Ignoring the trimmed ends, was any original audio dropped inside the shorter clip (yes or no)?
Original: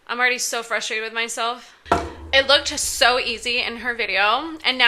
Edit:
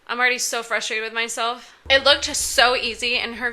yes